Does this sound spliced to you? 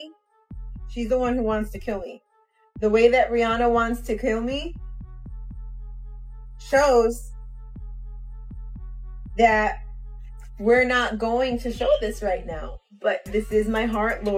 no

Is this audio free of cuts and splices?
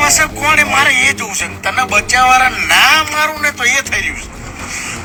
yes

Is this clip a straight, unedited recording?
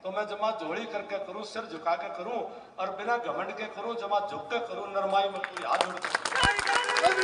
yes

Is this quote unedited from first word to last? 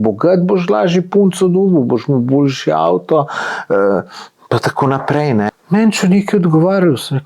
no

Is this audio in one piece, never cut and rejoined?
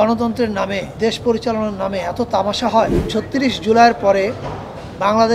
no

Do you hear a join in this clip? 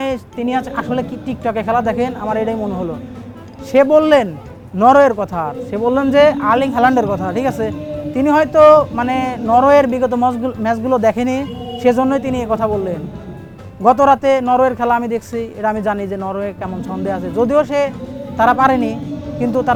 no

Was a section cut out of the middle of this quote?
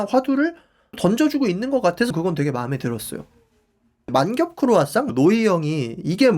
yes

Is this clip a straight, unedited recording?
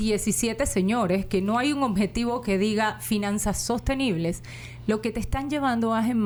yes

